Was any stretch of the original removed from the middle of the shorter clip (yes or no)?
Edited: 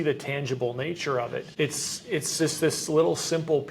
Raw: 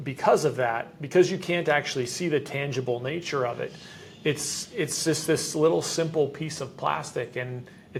yes